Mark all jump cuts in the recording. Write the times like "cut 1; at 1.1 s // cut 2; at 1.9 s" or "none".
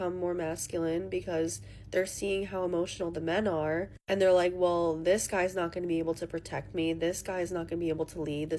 cut 1; at 1.2 s